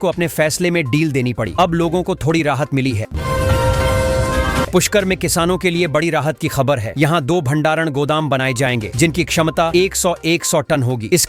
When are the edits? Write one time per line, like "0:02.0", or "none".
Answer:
0:03.1
0:04.7